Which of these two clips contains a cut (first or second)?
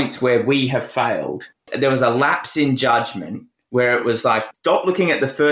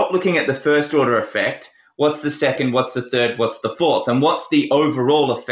first